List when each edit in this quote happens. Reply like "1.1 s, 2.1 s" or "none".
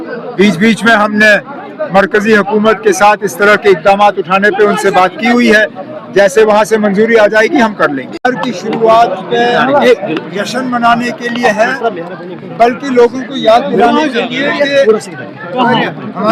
8.1 s